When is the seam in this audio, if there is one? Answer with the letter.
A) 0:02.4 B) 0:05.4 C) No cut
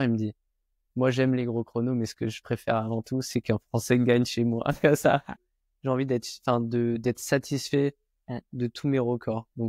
B